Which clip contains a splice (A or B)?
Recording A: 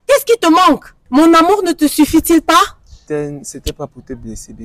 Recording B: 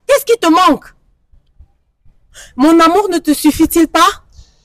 A